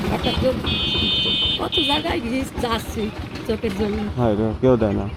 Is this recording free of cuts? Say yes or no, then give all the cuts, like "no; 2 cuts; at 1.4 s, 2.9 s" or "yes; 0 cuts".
yes; 0 cuts